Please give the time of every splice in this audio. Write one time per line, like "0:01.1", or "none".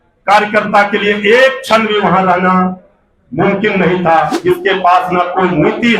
0:04.3